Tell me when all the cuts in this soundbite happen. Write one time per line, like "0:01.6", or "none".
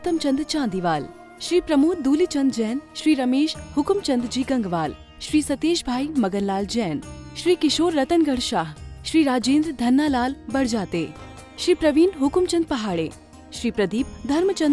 none